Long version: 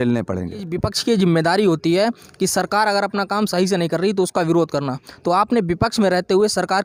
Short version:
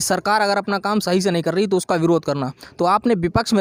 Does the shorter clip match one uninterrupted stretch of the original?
yes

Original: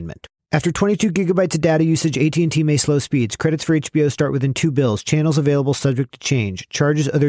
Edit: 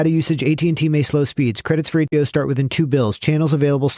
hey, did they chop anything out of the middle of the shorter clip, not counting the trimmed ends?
yes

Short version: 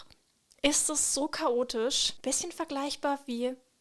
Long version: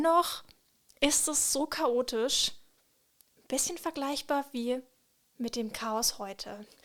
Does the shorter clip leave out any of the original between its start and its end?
yes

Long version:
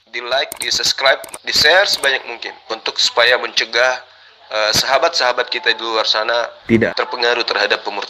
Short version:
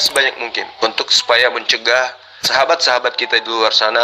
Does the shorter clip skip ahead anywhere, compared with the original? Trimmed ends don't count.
yes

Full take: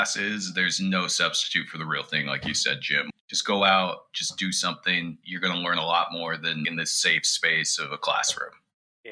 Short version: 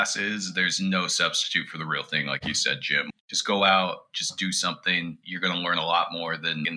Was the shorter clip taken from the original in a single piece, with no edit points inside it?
yes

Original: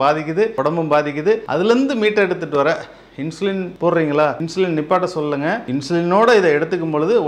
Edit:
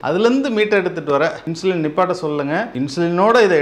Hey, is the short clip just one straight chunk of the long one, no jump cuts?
no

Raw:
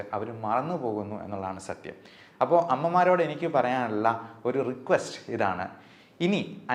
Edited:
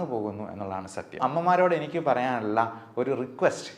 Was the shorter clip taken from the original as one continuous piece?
no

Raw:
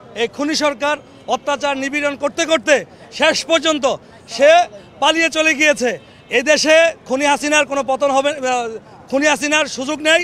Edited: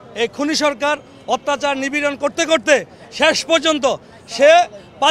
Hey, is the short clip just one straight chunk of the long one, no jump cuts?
yes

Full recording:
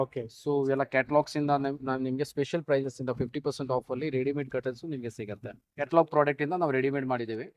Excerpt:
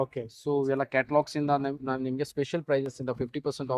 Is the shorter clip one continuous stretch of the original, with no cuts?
yes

